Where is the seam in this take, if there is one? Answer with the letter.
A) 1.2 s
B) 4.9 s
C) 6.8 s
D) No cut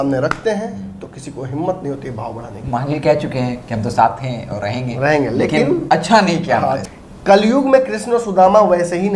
C